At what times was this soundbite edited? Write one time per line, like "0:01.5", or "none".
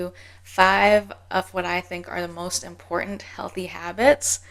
none